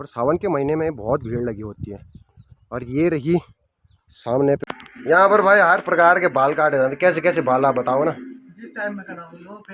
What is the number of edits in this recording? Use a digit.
1